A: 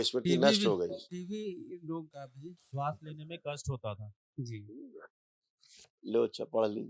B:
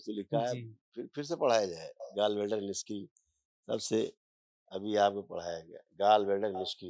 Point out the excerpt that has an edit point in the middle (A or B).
A